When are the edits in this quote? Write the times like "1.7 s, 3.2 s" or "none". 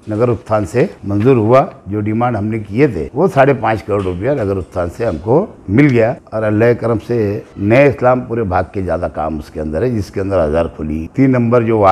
1.0 s, 3.0 s, 5.6 s, 6.2 s, 7.5 s, 11.1 s

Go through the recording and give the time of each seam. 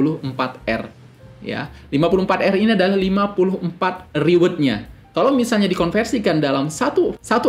none

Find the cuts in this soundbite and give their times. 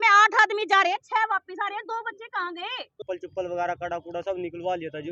3.0 s

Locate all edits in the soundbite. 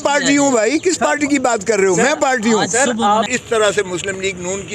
3.3 s

